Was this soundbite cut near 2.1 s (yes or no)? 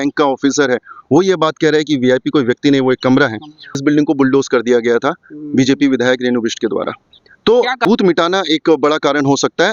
no